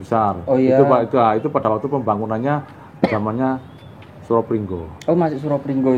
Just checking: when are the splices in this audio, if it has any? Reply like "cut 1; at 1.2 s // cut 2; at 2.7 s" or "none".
none